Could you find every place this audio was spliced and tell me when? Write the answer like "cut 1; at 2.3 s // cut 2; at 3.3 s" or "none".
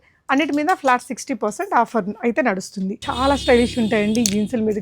cut 1; at 3.0 s